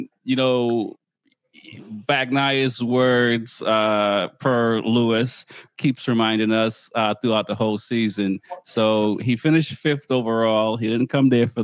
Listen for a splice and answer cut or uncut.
uncut